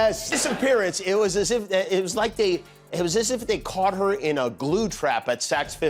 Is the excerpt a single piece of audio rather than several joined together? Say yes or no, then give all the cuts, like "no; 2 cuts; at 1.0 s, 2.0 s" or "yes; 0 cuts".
yes; 0 cuts